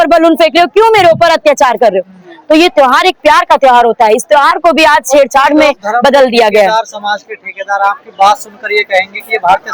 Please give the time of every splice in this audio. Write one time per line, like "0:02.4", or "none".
none